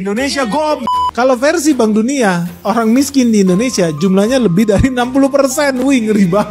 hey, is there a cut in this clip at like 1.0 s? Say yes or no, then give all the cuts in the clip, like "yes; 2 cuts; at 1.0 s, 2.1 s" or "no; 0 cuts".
yes; 1 cut; at 1.0 s